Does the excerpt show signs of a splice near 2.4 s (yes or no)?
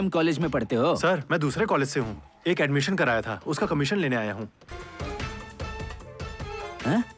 no